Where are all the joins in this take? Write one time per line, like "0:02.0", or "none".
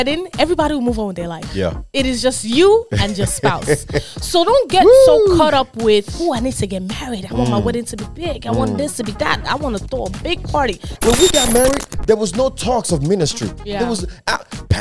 0:10.9